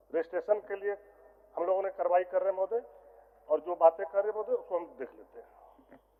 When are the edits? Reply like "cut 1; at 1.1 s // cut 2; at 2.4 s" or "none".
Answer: none